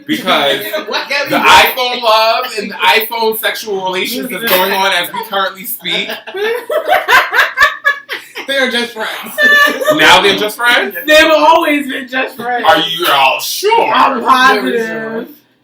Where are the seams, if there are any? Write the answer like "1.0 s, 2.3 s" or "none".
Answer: 3.9 s